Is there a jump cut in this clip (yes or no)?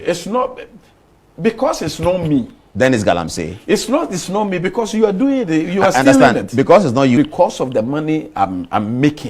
yes